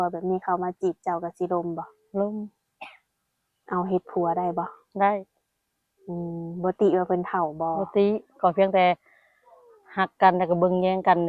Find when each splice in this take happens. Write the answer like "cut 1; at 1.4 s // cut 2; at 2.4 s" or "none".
none